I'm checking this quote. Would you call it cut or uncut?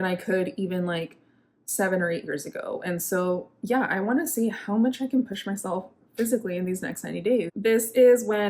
cut